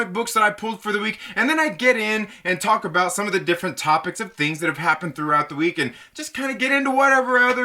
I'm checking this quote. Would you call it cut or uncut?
cut